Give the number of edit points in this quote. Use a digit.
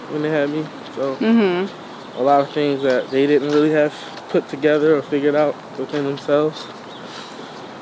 0